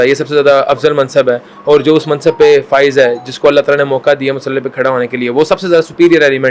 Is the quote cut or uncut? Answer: uncut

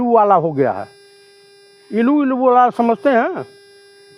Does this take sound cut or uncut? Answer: uncut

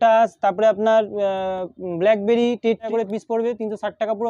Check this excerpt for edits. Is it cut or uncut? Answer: cut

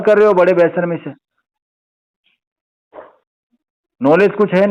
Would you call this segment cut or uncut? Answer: uncut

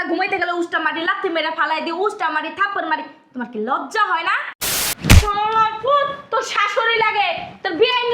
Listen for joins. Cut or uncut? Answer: cut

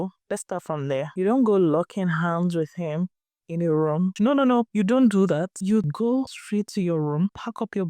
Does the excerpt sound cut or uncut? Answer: cut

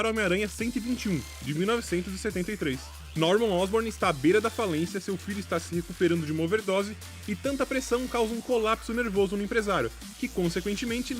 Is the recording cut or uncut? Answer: cut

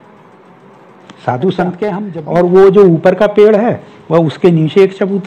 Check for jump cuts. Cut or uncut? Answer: cut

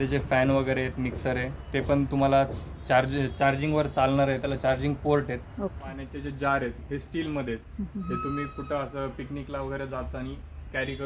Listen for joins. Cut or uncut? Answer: cut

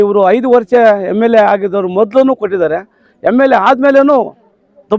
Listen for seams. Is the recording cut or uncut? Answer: uncut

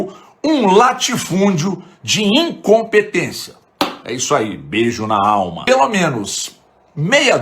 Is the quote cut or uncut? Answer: cut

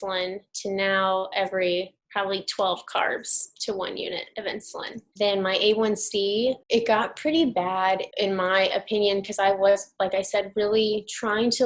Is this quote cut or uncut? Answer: cut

